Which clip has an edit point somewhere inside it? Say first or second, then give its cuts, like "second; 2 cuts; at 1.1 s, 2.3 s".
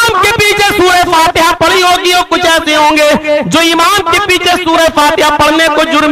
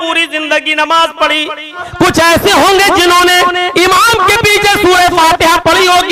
second; 1 cut; at 1.8 s